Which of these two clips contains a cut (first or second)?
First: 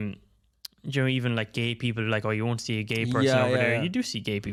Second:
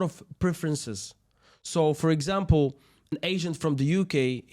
second